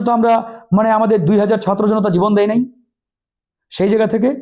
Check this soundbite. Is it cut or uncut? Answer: uncut